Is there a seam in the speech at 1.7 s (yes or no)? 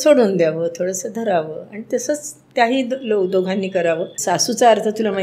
no